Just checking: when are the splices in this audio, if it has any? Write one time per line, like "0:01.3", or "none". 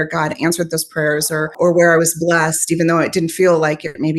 0:01.5